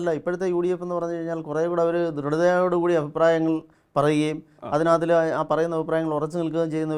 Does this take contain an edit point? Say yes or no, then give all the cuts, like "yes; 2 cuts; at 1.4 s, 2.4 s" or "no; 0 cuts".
no; 0 cuts